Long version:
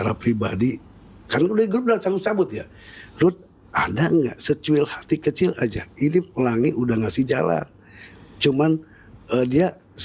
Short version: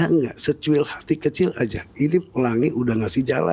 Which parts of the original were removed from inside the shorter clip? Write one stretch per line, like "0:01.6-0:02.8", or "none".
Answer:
none